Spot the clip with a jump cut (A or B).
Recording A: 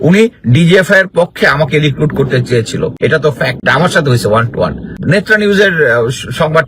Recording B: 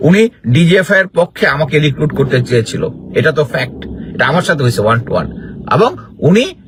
A